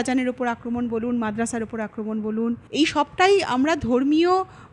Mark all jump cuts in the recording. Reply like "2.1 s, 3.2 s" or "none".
2.6 s